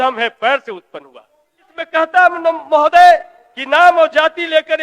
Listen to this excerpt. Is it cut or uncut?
cut